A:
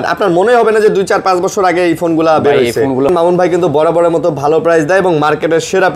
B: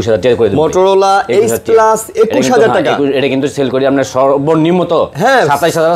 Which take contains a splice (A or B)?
A